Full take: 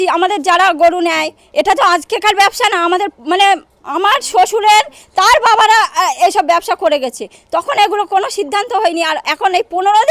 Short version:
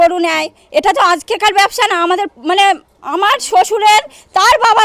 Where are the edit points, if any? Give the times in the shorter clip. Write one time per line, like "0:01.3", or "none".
none